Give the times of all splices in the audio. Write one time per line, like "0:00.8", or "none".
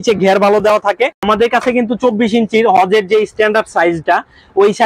0:01.2